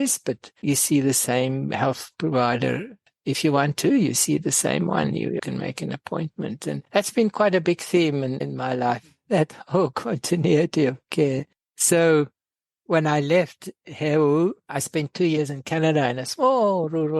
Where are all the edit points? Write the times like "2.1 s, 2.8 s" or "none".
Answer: 14.7 s